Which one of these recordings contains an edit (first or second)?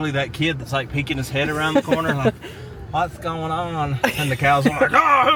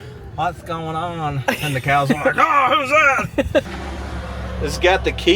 second